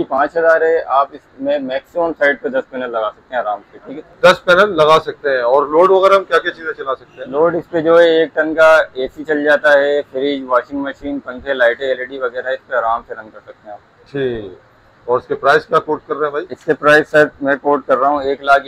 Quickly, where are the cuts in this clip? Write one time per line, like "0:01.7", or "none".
none

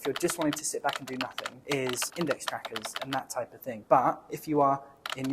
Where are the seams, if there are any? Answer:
0:01.5

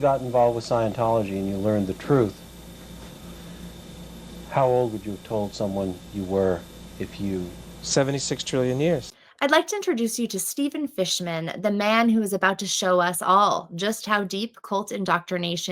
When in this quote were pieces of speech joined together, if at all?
0:09.0

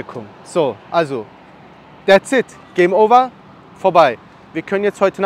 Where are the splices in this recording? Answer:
none

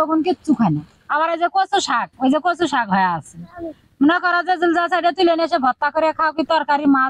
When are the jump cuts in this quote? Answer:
0:01.0

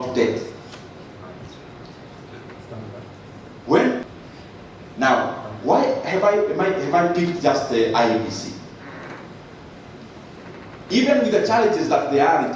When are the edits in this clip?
0:04.0

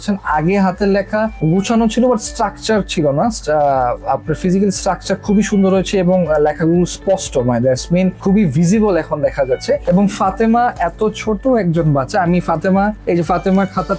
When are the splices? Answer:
none

